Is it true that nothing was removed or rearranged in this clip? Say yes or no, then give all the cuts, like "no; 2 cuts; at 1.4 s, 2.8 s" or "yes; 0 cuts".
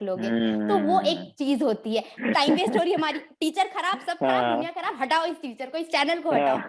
no; 1 cut; at 2.1 s